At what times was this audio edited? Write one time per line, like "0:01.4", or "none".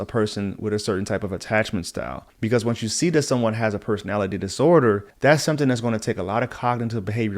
0:02.2
0:05.1